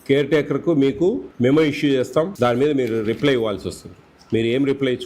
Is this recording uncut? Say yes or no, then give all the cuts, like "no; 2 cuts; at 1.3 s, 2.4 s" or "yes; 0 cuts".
no; 2 cuts; at 1.3 s, 2.3 s